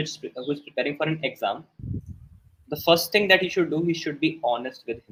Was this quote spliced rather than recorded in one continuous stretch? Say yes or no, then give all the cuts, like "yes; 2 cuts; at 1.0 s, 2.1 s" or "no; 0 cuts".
no; 0 cuts